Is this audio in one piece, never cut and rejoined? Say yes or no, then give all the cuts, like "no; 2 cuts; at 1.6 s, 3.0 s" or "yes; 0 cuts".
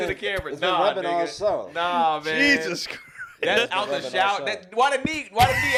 yes; 0 cuts